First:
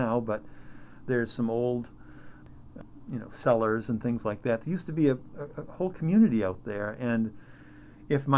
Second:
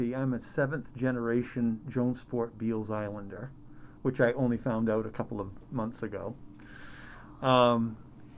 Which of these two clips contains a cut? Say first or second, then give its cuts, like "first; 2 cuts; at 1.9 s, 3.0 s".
first; 1 cut; at 2.4 s